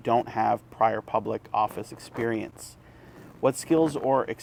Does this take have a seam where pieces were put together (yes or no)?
no